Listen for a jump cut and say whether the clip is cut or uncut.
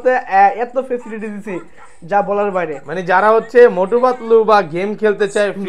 uncut